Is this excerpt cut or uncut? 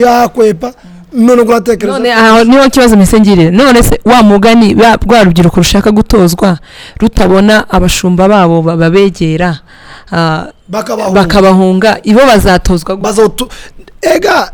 uncut